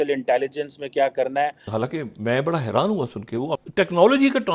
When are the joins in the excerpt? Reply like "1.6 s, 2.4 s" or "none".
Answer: 1.7 s, 3.5 s